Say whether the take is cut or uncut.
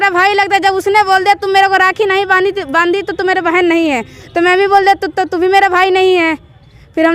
uncut